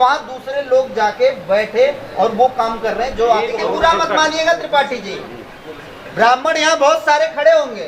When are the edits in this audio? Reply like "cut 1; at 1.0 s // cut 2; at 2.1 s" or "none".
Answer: cut 1; at 3.6 s